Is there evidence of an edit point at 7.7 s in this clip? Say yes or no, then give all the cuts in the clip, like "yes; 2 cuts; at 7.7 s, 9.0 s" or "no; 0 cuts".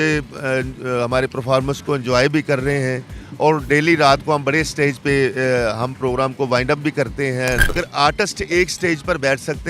yes; 1 cut; at 7.7 s